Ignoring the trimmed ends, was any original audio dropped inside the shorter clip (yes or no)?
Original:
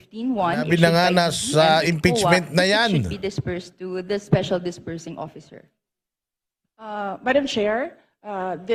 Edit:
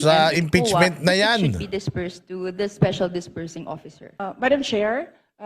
yes